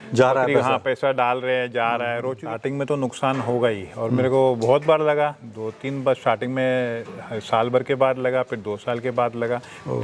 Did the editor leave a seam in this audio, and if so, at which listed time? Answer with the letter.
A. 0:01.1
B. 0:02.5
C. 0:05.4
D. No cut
B